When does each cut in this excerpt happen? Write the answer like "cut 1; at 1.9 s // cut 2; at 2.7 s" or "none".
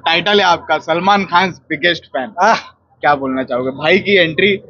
none